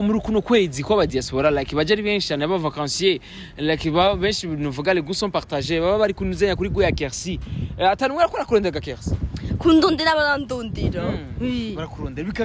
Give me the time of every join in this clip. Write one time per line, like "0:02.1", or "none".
none